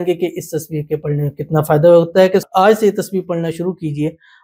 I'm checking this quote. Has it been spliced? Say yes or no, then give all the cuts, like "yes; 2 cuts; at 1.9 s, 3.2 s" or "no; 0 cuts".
yes; 1 cut; at 2.5 s